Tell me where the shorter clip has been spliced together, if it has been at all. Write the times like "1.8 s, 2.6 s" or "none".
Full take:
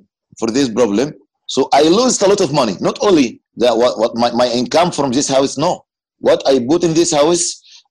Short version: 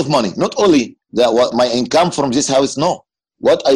1.5 s